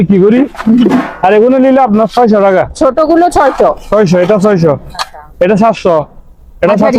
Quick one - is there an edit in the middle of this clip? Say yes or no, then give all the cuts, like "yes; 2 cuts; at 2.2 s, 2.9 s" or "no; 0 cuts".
no; 0 cuts